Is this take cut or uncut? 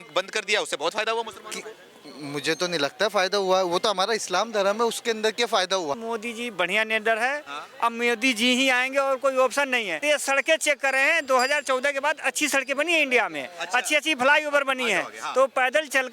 cut